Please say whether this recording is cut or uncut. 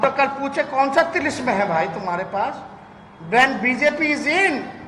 uncut